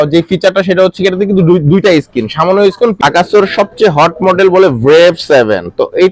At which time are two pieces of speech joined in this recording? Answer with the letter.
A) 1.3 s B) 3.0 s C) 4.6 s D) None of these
B